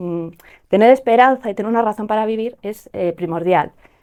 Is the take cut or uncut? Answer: uncut